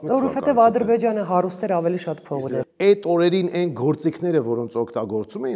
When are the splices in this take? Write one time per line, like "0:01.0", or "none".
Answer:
0:02.4